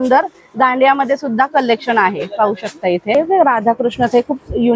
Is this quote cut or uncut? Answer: cut